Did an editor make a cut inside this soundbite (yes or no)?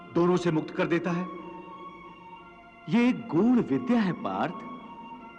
no